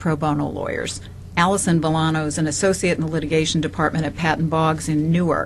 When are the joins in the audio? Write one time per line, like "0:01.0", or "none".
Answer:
none